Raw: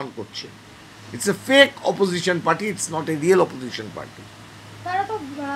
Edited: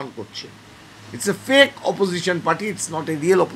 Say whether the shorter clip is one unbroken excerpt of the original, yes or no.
yes